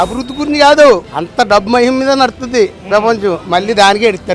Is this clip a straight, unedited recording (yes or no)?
no